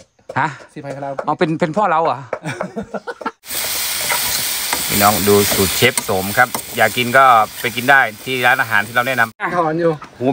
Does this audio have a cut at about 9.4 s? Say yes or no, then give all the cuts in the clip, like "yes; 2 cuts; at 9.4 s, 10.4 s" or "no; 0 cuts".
yes; 2 cuts; at 3.3 s, 9.4 s